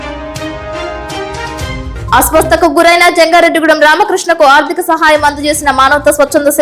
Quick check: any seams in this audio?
no; 0 cuts

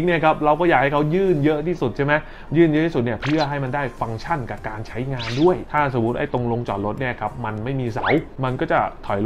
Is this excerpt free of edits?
no; 1 cut; at 5.7 s

